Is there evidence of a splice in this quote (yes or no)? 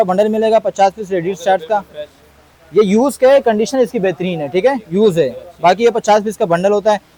no